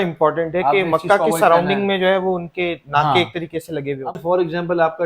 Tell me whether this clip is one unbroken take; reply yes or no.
no